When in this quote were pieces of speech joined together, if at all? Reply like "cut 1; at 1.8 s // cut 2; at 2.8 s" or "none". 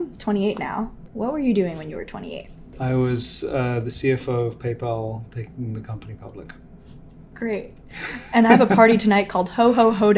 cut 1; at 1.0 s // cut 2; at 2.7 s